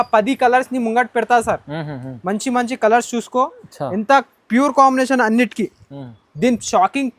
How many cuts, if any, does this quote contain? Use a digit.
0